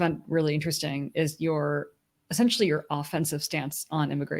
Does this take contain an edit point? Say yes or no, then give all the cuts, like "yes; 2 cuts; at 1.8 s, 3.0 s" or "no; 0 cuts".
no; 0 cuts